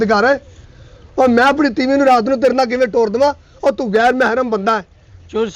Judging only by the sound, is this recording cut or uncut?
uncut